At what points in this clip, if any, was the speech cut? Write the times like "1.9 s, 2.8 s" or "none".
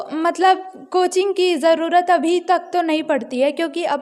none